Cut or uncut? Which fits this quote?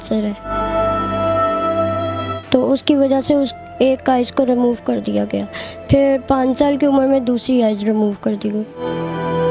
uncut